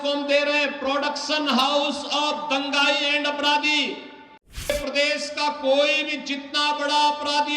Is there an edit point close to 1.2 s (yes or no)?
no